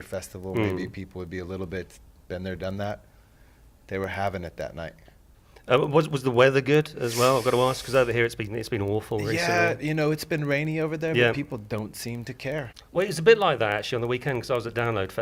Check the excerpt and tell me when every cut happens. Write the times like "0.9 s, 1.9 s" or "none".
none